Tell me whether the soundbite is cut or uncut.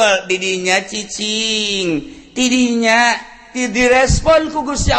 uncut